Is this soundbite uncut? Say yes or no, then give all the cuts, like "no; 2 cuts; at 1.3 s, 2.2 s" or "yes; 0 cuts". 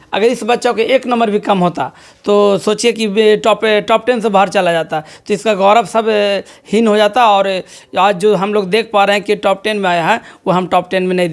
yes; 0 cuts